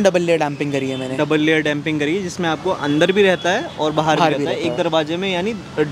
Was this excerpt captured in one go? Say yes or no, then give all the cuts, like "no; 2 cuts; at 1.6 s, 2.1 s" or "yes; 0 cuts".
yes; 0 cuts